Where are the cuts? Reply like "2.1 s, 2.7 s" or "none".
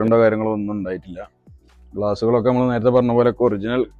none